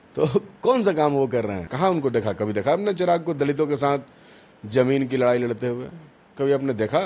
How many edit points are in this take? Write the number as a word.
one